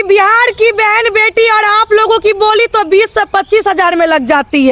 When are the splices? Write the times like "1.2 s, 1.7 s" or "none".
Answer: none